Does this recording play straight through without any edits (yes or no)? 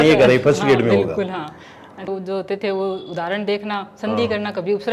no